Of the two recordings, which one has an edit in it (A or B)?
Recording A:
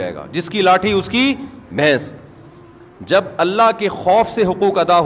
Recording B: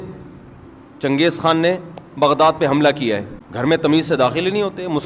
B